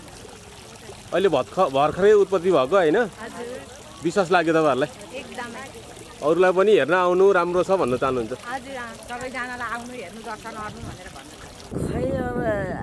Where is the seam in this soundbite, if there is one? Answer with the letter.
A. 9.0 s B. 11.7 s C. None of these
B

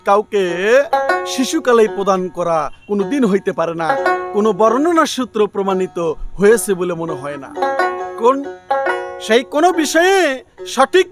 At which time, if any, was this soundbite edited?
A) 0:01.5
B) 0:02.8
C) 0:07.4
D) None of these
B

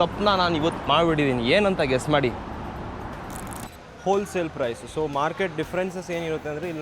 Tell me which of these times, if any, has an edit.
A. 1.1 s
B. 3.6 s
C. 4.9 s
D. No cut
B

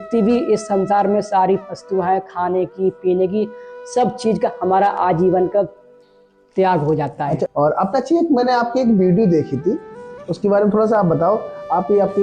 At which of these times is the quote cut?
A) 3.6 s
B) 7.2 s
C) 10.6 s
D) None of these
B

